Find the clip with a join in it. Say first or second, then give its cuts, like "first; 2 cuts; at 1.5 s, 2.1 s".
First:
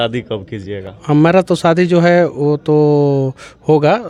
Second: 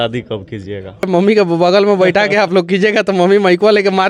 second; 1 cut; at 1.1 s